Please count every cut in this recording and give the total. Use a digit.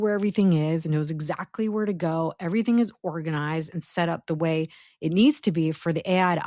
0